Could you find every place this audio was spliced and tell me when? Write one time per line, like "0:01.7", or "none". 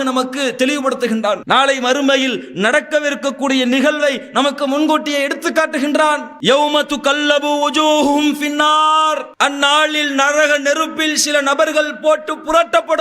0:09.3